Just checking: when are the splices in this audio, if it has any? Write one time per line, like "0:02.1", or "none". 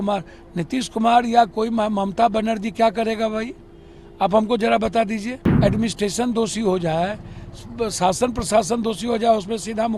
0:05.4